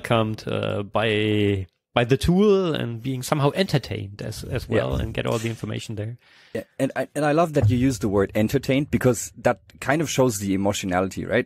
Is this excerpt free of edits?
yes; 0 cuts

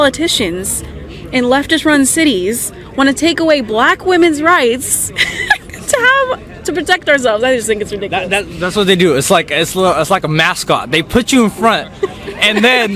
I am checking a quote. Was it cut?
no; 0 cuts

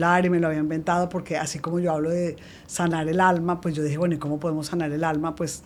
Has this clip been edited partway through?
no; 0 cuts

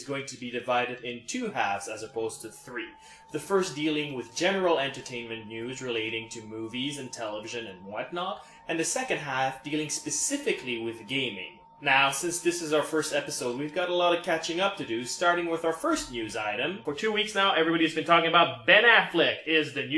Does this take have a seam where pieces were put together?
yes; 1 cut; at 12.0 s

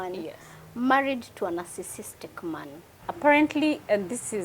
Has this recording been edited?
yes; 1 cut; at 2.5 s

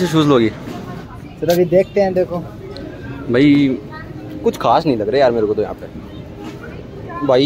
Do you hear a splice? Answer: no; 0 cuts

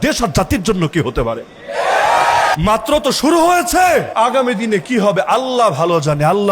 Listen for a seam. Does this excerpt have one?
yes; 2 cuts; at 2.5 s, 4.1 s

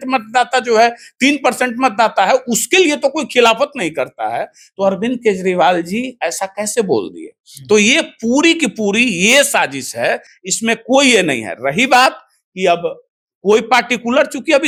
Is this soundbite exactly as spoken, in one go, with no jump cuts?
yes; 0 cuts

